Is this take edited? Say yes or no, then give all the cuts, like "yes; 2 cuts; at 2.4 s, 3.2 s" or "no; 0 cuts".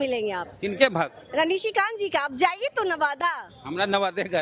no; 0 cuts